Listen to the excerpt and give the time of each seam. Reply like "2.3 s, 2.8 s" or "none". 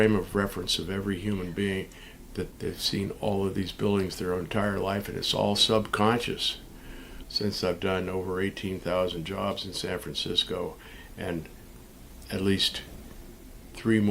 7.3 s